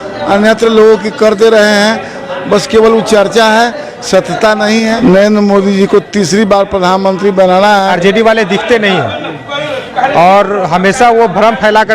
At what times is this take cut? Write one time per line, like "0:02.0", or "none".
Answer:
0:04.9
0:07.9